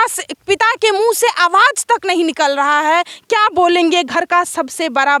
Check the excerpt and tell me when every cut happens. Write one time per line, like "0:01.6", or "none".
none